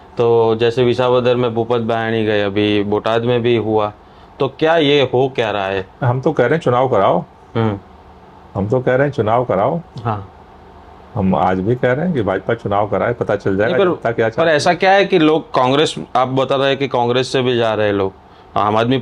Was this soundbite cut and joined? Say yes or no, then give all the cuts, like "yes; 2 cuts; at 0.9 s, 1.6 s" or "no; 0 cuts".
no; 0 cuts